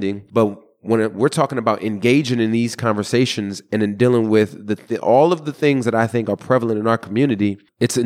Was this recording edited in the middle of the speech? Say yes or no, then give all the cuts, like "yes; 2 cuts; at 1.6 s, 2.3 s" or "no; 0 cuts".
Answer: no; 0 cuts